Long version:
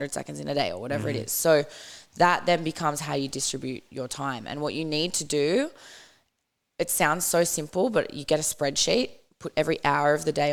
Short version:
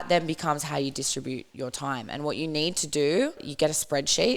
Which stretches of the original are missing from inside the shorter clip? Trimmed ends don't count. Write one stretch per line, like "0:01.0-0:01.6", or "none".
0:05.8-0:08.2